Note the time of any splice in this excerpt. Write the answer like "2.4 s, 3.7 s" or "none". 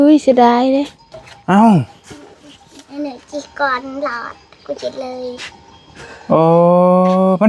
none